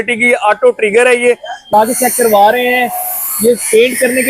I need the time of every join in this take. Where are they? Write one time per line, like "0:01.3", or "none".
0:01.7